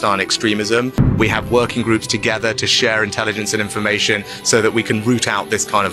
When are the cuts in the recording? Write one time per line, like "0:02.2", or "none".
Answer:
0:01.1